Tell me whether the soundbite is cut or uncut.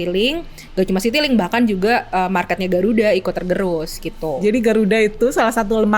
cut